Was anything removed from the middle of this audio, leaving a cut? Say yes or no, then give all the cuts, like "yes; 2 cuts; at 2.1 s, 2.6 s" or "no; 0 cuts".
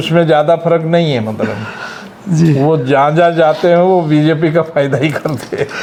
no; 0 cuts